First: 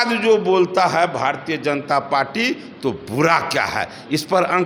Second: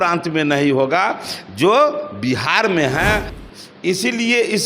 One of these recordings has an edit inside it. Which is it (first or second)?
second